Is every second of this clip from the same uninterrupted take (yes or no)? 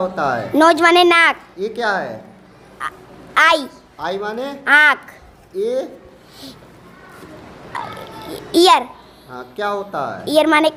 yes